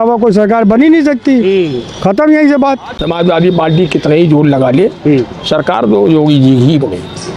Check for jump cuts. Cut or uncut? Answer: cut